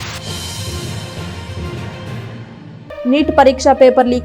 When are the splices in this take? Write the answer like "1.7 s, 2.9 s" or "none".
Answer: none